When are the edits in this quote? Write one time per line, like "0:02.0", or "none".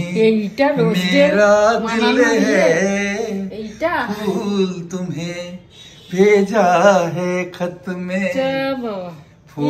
none